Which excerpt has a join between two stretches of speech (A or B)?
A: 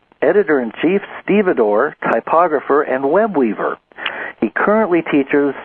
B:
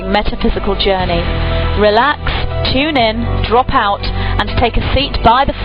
A